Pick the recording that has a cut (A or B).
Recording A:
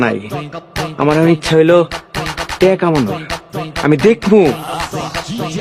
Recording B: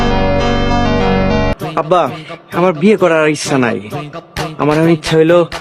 B